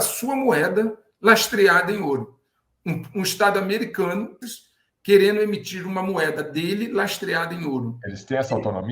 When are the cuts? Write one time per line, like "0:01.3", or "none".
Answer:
0:04.4